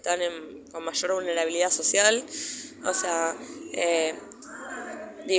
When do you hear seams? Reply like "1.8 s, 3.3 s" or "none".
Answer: none